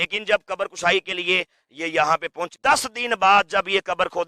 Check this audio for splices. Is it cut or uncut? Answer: cut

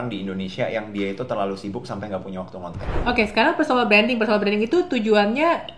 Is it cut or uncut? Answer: cut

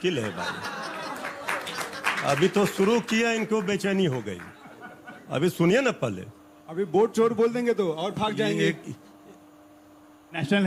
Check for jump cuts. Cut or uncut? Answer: uncut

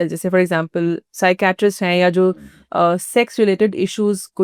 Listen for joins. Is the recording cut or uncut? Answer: uncut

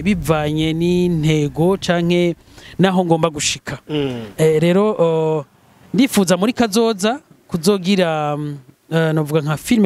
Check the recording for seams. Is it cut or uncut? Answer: uncut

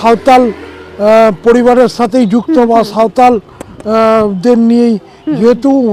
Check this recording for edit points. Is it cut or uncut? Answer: uncut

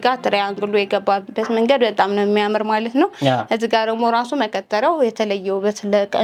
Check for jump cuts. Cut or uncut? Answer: uncut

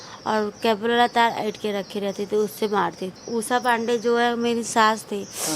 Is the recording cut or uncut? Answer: cut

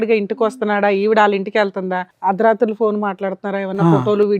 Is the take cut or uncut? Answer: cut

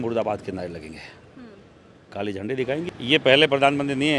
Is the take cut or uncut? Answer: cut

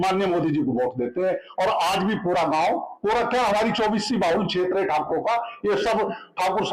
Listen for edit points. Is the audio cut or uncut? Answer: uncut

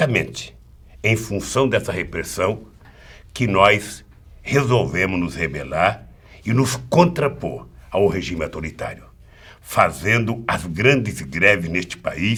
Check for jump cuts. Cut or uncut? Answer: uncut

